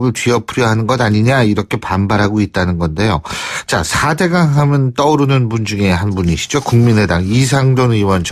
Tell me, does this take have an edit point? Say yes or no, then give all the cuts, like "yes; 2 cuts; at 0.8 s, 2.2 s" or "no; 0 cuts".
no; 0 cuts